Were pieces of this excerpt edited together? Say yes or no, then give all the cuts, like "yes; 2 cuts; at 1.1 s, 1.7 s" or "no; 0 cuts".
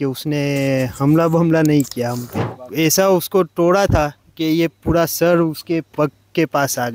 yes; 1 cut; at 2.5 s